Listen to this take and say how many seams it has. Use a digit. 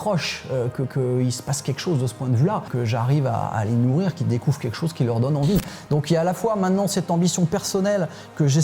1